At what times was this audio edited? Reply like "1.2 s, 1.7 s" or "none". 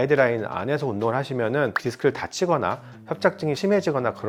none